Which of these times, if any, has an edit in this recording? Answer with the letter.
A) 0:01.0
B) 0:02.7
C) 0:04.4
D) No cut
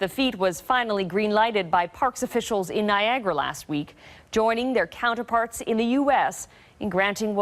B